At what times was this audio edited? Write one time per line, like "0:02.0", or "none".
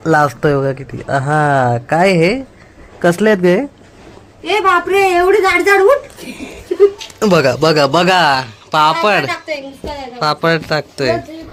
none